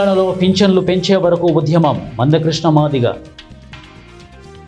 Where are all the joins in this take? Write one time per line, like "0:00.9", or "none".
0:03.8